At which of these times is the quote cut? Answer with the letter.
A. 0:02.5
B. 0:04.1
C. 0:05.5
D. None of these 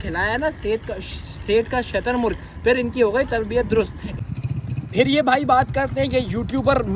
B